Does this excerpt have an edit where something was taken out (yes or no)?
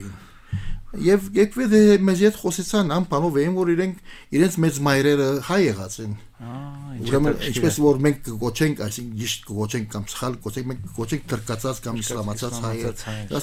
no